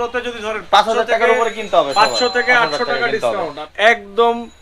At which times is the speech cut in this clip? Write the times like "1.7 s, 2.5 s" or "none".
3.6 s